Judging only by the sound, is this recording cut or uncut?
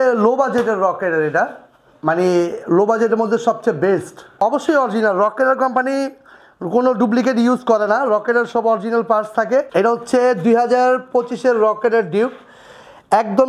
cut